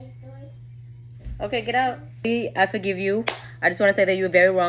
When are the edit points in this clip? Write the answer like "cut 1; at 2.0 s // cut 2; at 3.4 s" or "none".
cut 1; at 2.2 s